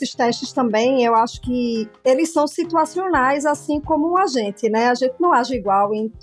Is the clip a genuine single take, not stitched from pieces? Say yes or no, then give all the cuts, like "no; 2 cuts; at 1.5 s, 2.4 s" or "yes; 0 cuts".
yes; 0 cuts